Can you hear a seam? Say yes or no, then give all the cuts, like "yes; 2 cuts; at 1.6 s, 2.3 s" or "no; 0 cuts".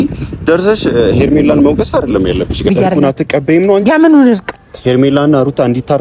yes; 1 cut; at 2.7 s